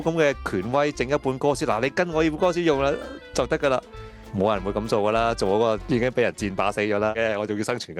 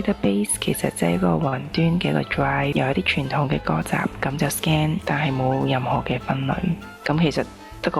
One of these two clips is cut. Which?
second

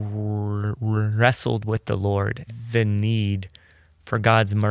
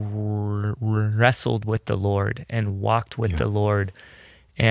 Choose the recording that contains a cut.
first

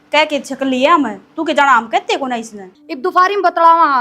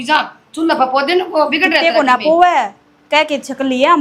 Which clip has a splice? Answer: first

